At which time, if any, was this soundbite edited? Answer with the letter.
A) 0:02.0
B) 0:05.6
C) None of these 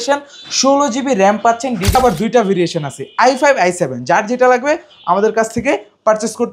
A